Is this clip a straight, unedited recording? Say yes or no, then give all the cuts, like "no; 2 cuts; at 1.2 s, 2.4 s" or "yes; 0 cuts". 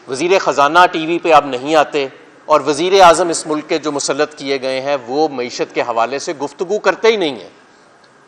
yes; 0 cuts